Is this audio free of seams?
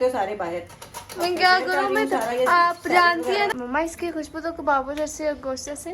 no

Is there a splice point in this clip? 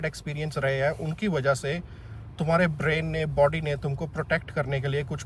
no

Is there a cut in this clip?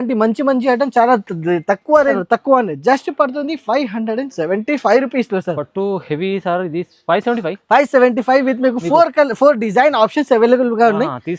yes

